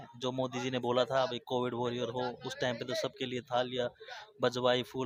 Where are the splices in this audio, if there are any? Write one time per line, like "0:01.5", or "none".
none